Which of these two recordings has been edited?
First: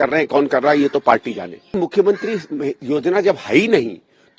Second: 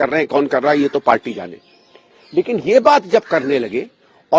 first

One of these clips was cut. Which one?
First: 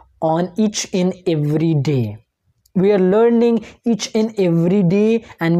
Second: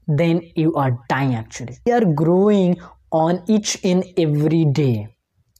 second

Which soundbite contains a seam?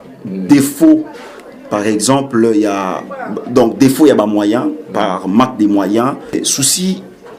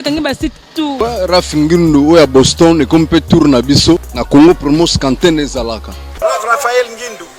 second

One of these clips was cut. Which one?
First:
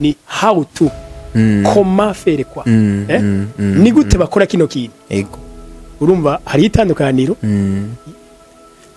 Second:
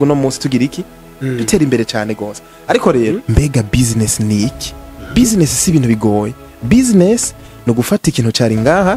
second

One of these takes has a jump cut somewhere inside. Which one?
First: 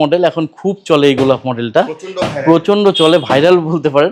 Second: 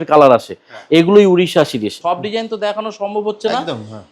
second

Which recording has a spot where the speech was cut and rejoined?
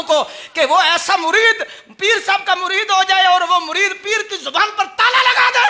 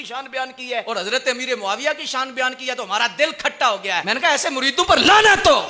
second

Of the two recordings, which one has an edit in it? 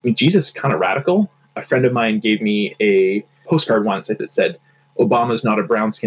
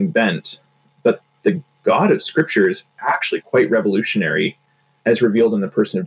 first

